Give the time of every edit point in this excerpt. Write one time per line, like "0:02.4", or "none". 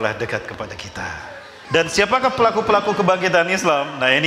0:01.6